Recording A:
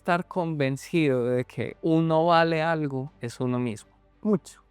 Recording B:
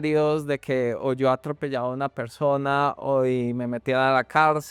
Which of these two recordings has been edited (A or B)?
A